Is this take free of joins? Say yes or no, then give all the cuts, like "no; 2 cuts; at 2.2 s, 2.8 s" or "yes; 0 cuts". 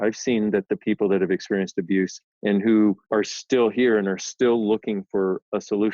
no; 2 cuts; at 2.2 s, 3.0 s